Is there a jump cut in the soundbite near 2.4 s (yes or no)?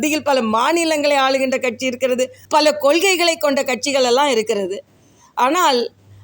yes